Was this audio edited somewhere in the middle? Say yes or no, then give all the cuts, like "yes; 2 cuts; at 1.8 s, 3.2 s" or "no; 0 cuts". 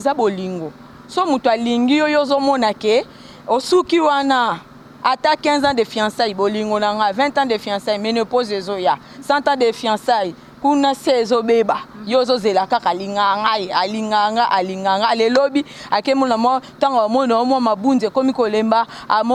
no; 0 cuts